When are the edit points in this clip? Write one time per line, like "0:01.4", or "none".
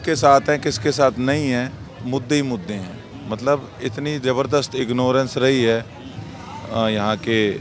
0:01.9